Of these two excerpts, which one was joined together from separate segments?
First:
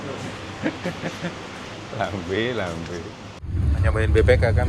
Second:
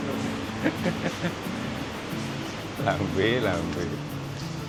first; 2 cuts; at 1.6 s, 3.5 s

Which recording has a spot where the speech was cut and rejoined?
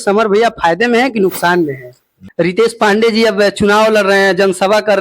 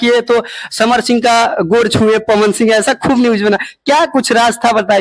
first; 1 cut; at 2.2 s

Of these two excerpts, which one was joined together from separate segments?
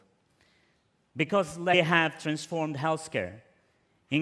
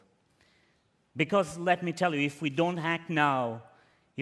second; 1 cut; at 1.7 s

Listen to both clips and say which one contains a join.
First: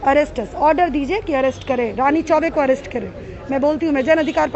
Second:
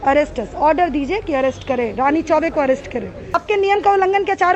second; 1 cut; at 3.4 s

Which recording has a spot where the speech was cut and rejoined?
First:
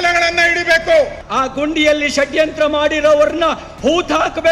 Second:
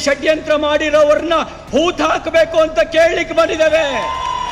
first; 1 cut; at 1.2 s

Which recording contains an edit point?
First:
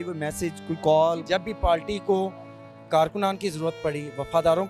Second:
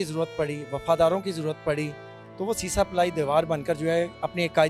first; 1 cut; at 1.2 s

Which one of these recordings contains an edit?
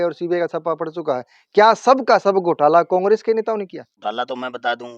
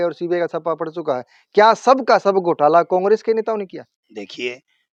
first; 1 cut; at 3.9 s

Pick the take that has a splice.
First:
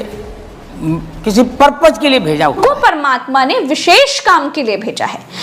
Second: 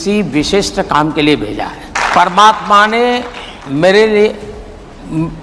first; 1 cut; at 2.6 s

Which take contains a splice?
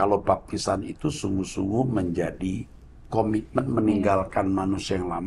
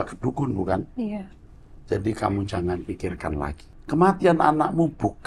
second; 1 cut; at 3.7 s

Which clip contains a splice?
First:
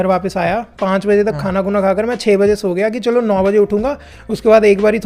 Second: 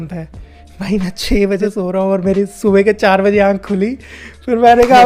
second; 1 cut; at 1.6 s

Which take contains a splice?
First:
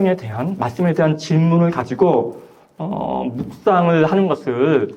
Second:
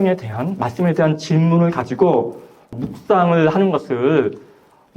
second; 1 cut; at 2.8 s

